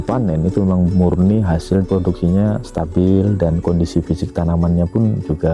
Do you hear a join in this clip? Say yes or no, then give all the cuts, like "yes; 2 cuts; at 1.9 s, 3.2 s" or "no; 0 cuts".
yes; 1 cut; at 1.9 s